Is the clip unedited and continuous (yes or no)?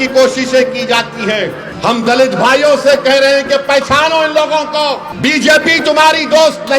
no